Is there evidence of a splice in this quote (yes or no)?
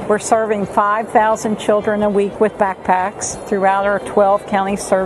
no